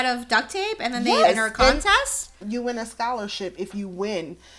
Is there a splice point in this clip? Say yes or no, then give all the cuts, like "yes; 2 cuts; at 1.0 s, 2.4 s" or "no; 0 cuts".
yes; 1 cut; at 2.4 s